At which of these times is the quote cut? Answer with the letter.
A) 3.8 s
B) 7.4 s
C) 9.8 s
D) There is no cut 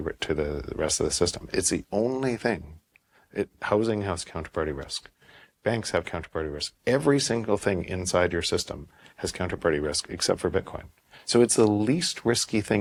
D